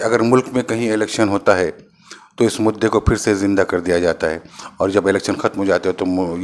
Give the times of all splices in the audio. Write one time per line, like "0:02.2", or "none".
none